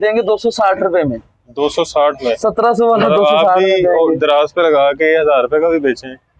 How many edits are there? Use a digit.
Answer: 0